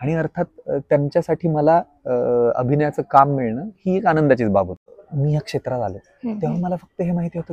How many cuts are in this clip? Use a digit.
1